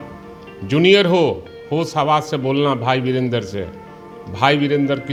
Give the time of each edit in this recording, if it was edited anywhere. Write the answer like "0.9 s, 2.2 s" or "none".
none